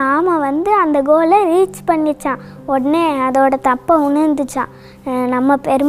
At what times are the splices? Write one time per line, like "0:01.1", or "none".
none